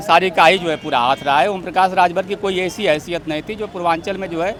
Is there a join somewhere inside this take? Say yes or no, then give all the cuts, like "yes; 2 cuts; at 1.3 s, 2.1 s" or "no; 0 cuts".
no; 0 cuts